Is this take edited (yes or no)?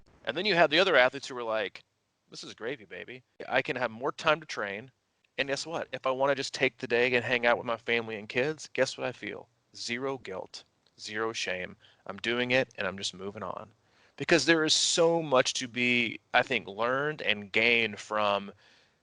yes